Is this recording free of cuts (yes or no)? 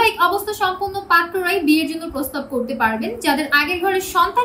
yes